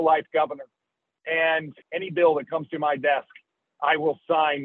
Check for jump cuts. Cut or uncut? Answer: cut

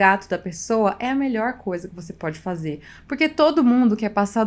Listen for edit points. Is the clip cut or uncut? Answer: uncut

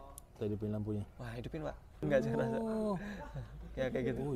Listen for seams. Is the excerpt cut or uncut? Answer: cut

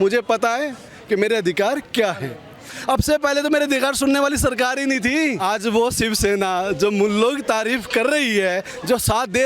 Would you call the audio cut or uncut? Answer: cut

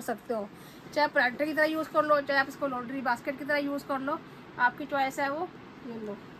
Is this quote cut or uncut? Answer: uncut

